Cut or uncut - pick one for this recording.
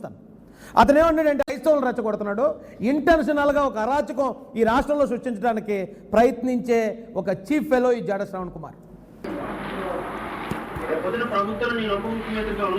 cut